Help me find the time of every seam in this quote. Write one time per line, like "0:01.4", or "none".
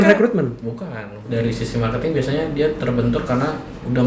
0:01.3